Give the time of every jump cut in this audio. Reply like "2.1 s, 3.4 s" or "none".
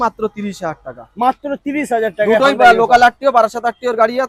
none